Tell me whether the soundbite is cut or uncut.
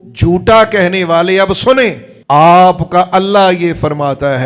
cut